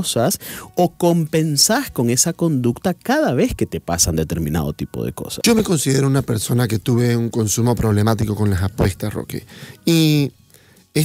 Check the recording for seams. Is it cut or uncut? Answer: cut